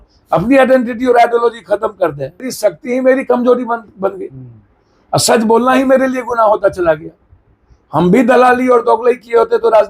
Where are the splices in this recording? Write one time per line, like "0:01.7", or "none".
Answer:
0:02.0